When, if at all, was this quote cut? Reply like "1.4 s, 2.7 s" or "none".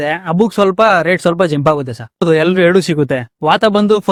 none